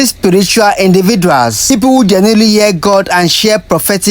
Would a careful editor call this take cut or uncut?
cut